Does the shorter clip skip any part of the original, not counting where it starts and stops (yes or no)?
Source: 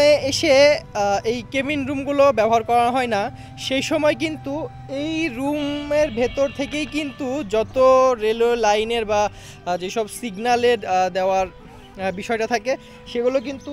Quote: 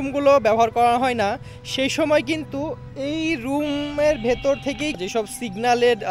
yes